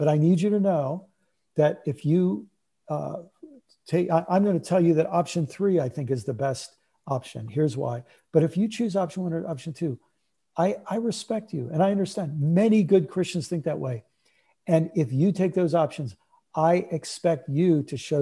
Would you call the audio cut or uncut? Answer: uncut